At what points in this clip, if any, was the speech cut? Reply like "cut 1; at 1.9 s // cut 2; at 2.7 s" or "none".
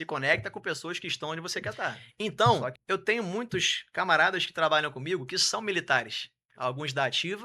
cut 1; at 2.1 s